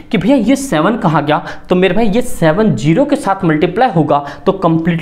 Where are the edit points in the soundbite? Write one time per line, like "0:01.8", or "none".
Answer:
none

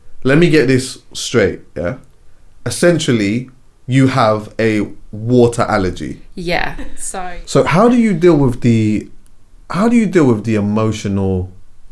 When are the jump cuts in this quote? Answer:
0:07.0

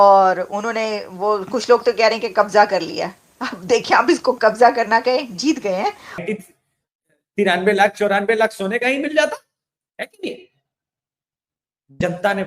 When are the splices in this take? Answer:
0:06.2

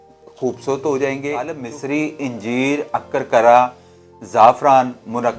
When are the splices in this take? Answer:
0:01.7

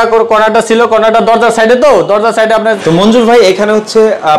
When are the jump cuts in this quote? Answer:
0:02.6

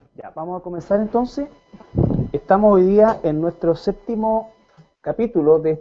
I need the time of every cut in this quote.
none

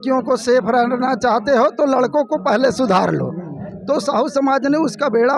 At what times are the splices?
none

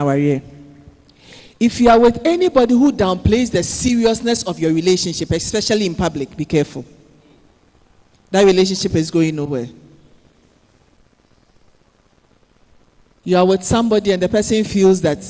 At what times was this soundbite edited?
0:11.0

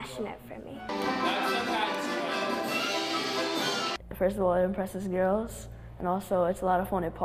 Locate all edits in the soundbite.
0:00.9
0:03.9

